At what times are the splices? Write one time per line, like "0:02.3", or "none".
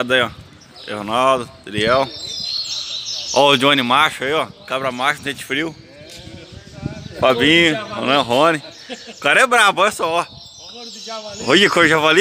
none